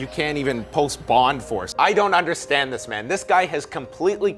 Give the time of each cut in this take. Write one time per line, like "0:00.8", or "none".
0:01.7